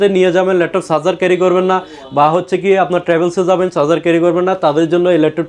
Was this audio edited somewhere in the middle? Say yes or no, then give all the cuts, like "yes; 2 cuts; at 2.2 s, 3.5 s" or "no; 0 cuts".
no; 0 cuts